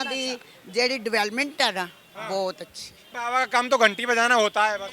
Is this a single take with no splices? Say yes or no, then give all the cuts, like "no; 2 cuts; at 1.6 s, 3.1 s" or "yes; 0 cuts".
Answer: no; 1 cut; at 3.1 s